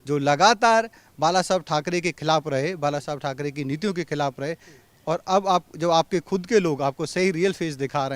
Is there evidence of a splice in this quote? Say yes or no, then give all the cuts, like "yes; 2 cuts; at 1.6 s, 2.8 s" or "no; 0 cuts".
no; 0 cuts